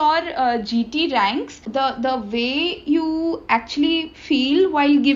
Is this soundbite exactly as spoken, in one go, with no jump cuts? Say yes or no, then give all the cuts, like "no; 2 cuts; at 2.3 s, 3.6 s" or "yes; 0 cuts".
no; 1 cut; at 1.6 s